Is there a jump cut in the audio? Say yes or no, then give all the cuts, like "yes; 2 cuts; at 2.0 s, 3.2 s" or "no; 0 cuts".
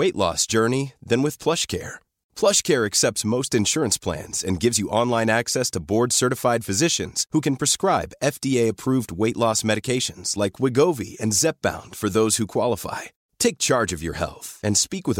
no; 0 cuts